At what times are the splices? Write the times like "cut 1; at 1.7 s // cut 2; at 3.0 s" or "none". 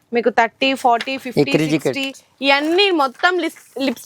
none